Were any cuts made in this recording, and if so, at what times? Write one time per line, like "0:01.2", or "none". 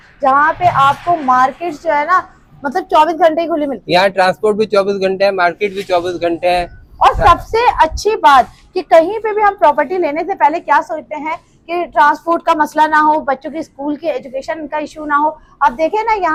none